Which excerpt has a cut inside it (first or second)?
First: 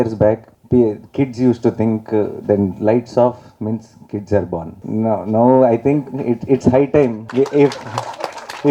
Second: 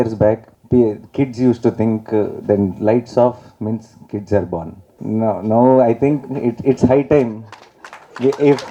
first